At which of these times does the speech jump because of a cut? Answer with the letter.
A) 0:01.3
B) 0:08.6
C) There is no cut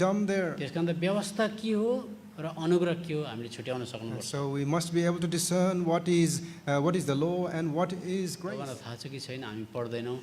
B